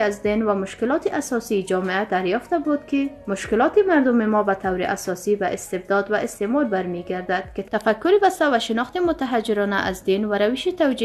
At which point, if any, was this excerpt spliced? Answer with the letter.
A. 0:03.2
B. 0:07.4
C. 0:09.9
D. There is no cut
A